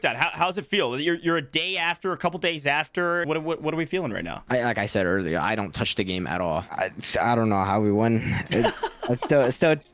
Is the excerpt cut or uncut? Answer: cut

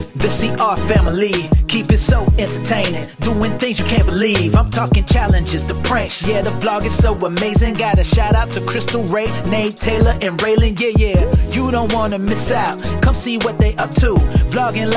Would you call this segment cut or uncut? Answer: uncut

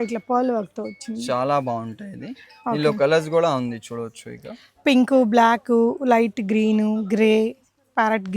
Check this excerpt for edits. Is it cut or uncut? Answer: uncut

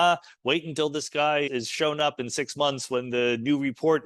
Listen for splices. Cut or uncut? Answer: cut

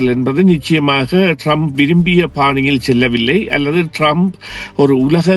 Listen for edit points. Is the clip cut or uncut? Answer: uncut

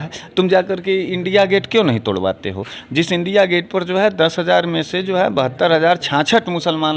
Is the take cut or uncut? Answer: uncut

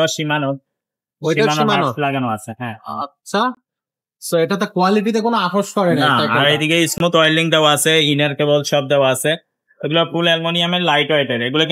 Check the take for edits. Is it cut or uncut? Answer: uncut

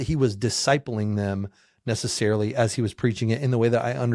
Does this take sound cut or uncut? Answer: uncut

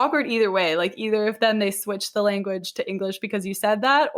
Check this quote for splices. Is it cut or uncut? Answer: uncut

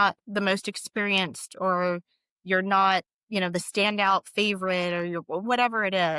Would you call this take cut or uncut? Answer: uncut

